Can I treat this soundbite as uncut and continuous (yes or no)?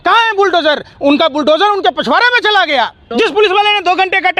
no